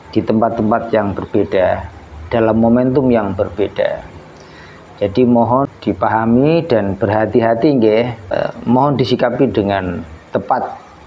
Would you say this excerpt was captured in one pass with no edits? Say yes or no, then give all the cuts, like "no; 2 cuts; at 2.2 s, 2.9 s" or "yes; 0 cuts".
no; 2 cuts; at 5.6 s, 8.3 s